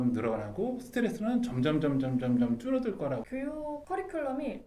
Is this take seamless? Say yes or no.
no